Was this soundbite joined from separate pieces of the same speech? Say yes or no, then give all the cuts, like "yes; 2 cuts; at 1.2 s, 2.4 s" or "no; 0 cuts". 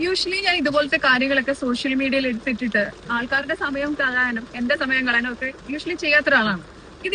no; 0 cuts